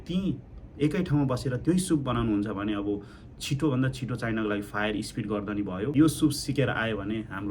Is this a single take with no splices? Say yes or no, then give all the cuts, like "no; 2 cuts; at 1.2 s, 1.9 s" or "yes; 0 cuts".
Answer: no; 1 cut; at 5.9 s